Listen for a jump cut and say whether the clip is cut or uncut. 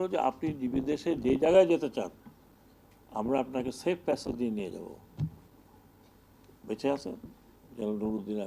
uncut